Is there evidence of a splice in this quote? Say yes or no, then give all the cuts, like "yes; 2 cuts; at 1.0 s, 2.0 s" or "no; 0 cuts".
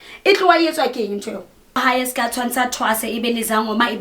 yes; 1 cut; at 1.8 s